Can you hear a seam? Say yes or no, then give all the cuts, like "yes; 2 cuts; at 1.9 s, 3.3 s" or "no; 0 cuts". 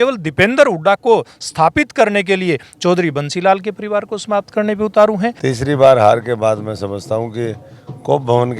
yes; 1 cut; at 5.4 s